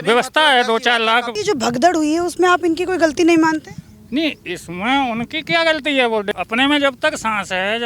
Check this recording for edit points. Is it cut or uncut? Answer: cut